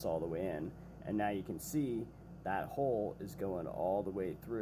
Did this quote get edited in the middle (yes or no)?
no